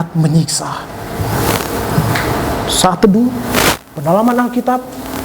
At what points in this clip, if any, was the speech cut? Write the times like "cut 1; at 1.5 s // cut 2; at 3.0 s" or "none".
none